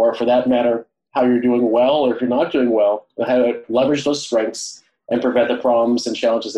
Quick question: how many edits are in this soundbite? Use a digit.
1